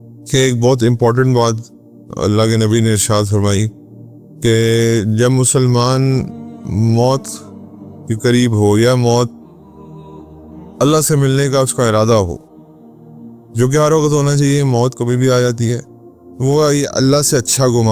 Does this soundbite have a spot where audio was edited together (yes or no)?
yes